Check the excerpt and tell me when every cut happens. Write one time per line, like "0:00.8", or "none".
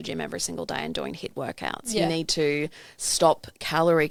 none